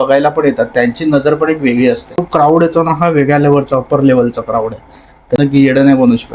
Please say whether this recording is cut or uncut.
cut